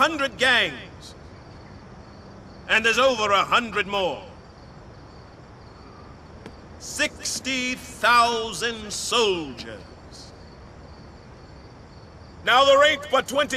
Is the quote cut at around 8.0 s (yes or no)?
no